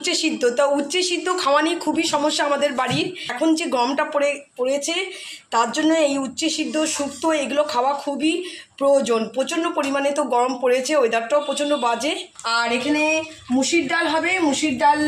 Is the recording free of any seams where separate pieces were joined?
yes; 0 cuts

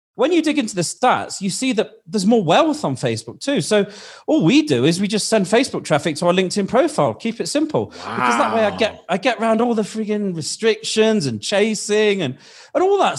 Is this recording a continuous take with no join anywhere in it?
no; 1 cut; at 0.9 s

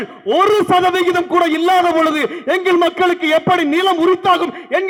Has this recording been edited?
no; 0 cuts

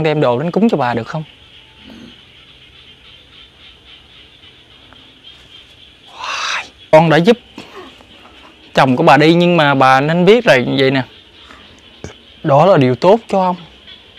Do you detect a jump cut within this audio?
yes; 1 cut; at 6.9 s

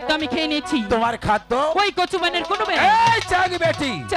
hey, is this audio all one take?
yes; 0 cuts

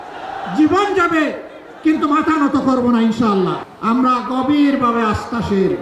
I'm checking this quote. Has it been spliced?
yes; 1 cut; at 3.7 s

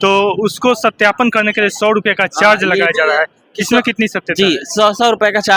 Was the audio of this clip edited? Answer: no; 0 cuts

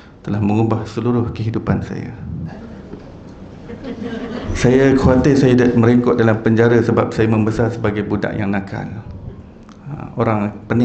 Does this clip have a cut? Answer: yes; 1 cut; at 2.5 s

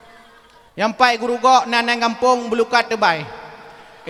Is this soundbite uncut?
yes; 0 cuts

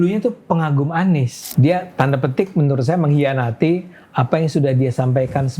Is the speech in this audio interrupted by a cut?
yes; 1 cut; at 1.4 s

